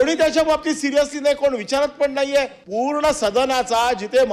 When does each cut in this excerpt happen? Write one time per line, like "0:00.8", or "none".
0:02.6